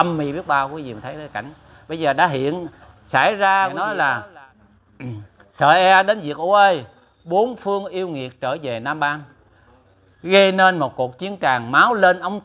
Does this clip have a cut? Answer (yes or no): yes